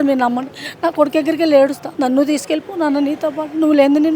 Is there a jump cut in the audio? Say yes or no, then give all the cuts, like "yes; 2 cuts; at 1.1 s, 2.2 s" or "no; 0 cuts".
yes; 1 cut; at 1.8 s